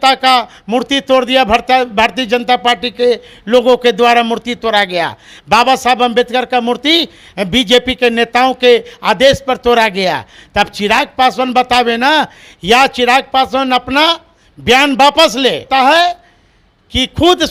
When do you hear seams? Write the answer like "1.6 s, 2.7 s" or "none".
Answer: none